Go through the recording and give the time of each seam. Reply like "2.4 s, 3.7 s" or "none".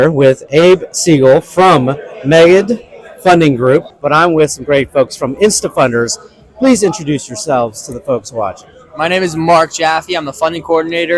3.9 s